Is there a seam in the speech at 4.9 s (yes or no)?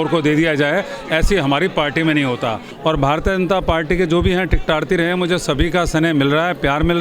no